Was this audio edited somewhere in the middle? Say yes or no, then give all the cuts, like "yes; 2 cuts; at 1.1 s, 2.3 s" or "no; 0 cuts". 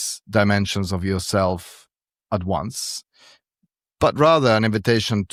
no; 0 cuts